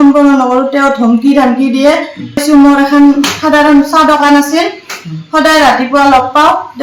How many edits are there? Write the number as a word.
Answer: one